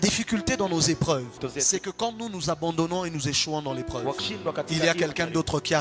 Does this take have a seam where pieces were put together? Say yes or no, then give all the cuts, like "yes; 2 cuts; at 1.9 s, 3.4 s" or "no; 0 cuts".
no; 0 cuts